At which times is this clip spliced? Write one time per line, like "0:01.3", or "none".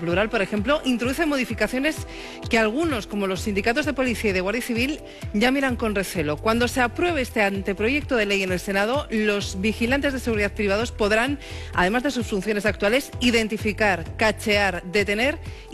0:07.4